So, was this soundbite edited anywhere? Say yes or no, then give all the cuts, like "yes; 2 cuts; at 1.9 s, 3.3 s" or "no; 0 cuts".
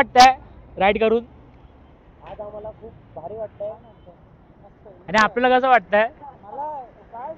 no; 0 cuts